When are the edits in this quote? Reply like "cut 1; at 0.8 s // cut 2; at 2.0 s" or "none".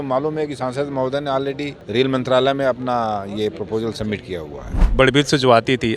cut 1; at 1.7 s // cut 2; at 4.9 s